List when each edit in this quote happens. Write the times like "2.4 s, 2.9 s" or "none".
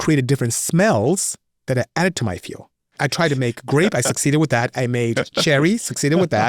3.0 s